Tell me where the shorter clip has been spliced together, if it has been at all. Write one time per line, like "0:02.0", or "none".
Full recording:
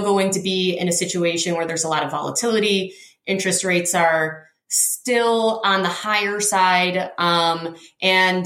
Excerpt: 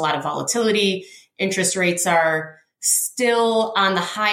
none